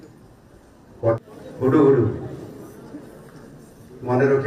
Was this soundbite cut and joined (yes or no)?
yes